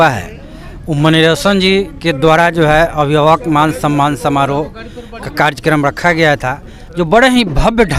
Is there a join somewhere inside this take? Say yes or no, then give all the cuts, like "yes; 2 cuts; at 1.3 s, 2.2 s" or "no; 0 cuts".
no; 0 cuts